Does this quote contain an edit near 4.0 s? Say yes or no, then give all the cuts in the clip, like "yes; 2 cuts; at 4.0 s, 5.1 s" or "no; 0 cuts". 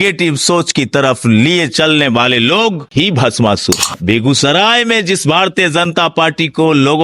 yes; 1 cut; at 4.0 s